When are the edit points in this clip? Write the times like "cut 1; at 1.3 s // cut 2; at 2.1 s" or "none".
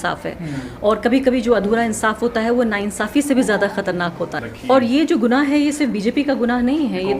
cut 1; at 4.5 s